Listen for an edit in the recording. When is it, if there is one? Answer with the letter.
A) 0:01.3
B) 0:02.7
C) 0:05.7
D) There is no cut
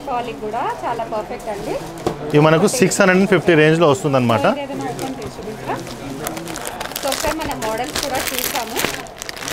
D